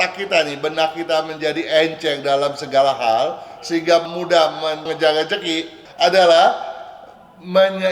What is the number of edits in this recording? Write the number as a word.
one